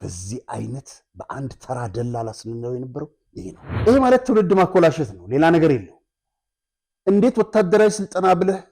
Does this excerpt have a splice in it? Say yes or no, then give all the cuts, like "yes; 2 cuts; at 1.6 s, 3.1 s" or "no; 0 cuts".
yes; 1 cut; at 3.7 s